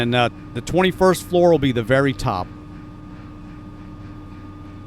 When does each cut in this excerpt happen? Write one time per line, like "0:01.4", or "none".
0:03.0